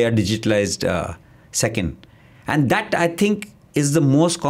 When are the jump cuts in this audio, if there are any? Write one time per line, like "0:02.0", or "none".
none